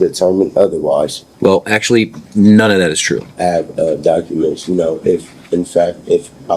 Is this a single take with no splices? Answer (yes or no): no